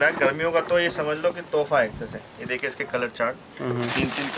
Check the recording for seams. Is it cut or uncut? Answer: uncut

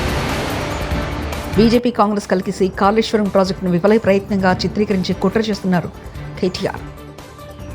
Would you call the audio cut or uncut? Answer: cut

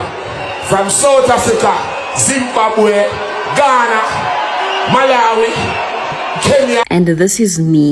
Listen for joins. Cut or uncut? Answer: cut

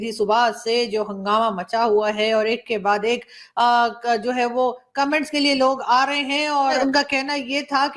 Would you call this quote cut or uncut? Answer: cut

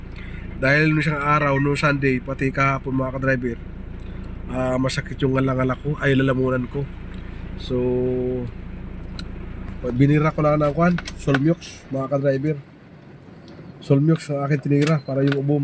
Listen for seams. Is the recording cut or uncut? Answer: uncut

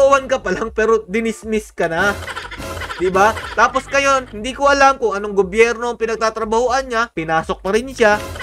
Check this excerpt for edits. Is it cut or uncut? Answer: uncut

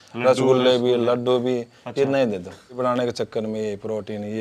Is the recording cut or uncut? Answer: cut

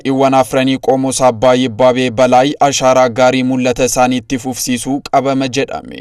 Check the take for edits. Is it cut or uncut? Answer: uncut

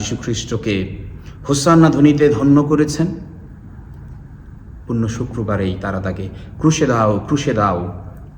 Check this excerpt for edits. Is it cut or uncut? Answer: uncut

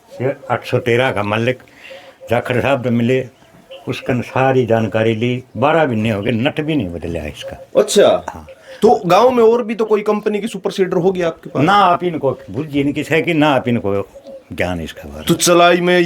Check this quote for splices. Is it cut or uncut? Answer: uncut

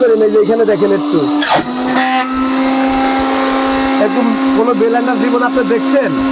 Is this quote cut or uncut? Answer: uncut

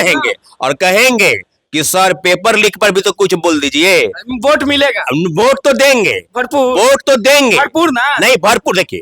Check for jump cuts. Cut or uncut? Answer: uncut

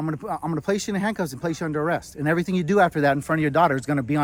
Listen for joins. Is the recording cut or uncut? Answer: uncut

